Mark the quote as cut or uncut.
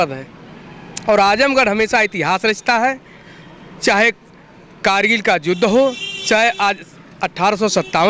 uncut